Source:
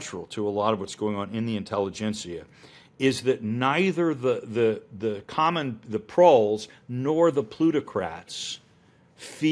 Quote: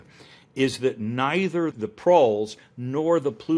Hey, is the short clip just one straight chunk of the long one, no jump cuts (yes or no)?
no